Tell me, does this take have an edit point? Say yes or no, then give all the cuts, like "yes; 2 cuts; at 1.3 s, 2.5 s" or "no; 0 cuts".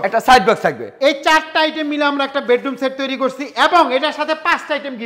no; 0 cuts